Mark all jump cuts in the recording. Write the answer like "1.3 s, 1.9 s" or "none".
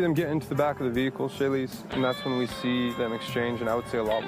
2.9 s